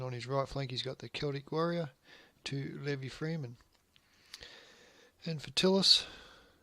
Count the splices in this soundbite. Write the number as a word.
zero